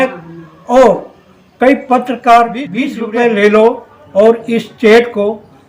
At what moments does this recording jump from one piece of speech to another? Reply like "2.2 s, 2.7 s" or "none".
2.8 s

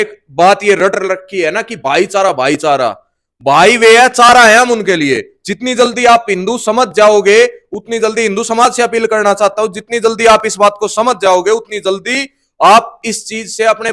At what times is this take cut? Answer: none

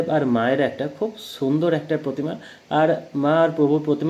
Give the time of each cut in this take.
none

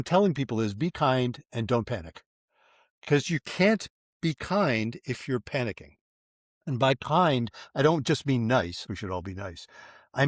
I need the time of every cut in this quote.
8.8 s

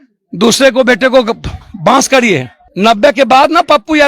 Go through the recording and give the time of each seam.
2.6 s

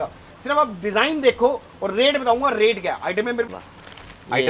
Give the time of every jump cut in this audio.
3.5 s

